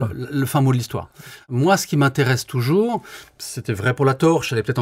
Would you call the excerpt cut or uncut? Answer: cut